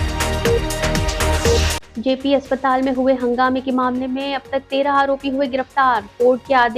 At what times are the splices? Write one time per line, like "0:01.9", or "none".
0:01.8